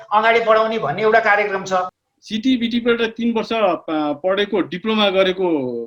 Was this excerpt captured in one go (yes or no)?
no